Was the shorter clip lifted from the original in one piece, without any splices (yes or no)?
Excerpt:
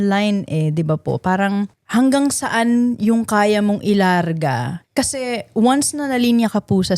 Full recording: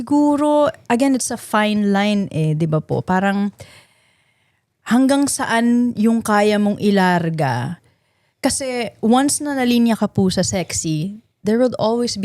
no